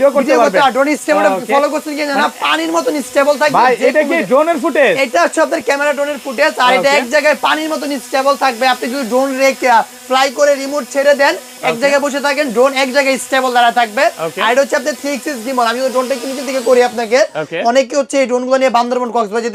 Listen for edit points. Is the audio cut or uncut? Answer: uncut